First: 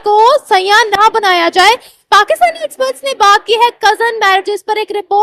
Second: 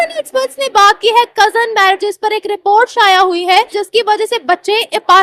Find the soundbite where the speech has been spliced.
second; 1 cut; at 3.7 s

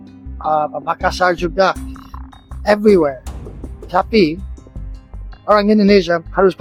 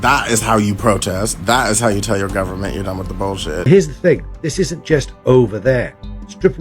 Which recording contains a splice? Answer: second; 1 cut; at 3.7 s

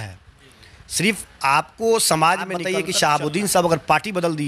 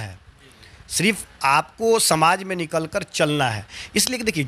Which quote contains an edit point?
first; 1 cut; at 2.6 s

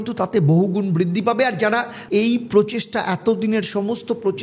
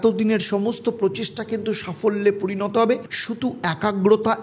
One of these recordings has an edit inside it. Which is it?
first; 1 cut; at 2.0 s

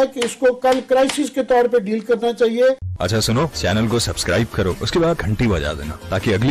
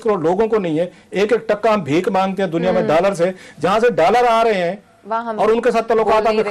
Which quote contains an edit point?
first; 1 cut; at 2.9 s

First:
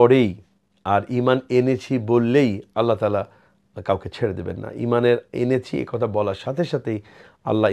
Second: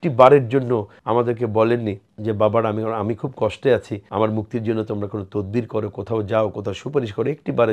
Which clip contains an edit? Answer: second; 3 cuts; at 0.9 s, 2.1 s, 4.0 s

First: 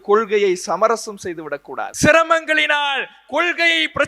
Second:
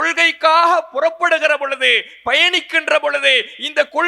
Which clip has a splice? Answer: first; 1 cut; at 1.9 s

